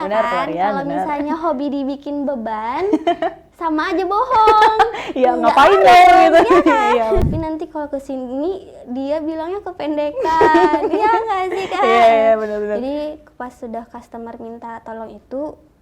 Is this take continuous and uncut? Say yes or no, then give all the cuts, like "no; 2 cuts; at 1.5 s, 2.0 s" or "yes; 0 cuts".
no; 1 cut; at 7.2 s